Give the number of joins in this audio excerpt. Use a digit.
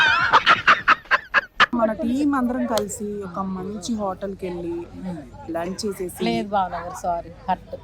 1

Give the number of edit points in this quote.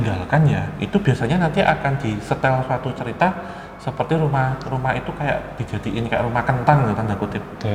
0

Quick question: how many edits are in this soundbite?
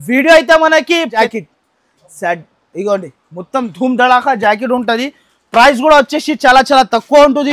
1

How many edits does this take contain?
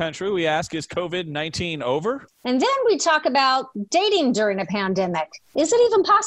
1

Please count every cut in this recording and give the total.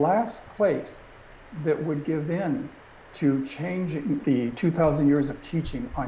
1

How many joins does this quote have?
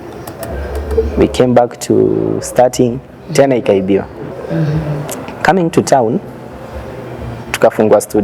1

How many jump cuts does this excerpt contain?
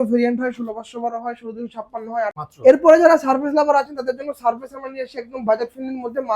1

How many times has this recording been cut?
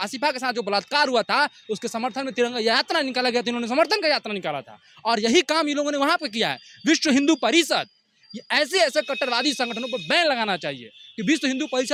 0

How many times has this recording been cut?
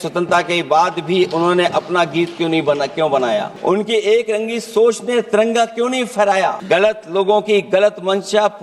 2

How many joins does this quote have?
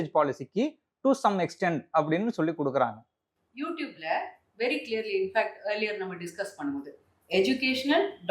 0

